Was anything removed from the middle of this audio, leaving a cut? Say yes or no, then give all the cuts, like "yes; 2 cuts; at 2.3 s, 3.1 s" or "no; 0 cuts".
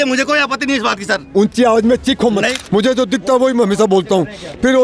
yes; 1 cut; at 2.5 s